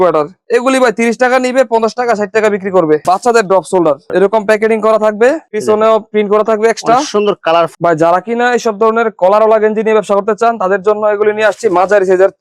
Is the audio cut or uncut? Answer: cut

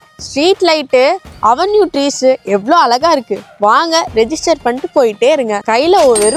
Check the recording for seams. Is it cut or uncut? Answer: uncut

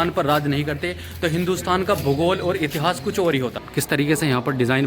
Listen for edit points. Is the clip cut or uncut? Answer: cut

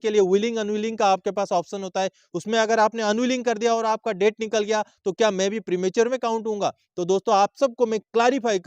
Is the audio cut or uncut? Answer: uncut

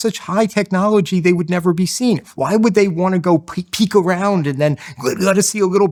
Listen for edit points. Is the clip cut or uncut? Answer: uncut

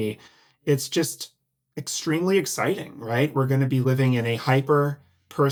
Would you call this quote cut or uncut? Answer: uncut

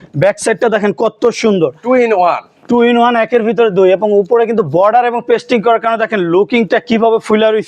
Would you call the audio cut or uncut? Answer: uncut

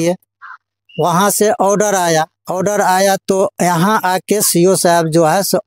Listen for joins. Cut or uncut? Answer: uncut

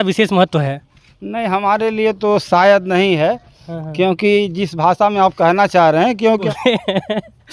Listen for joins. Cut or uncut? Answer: cut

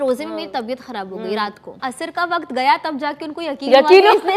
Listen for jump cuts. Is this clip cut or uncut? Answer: cut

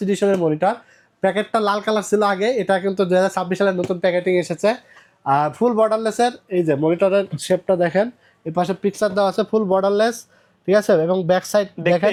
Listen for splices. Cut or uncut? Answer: uncut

